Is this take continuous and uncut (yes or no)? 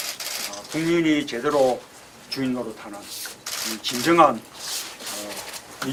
yes